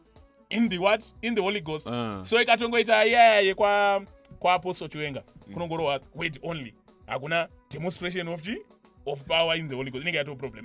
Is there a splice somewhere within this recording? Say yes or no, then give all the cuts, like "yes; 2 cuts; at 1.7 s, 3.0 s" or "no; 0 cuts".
no; 0 cuts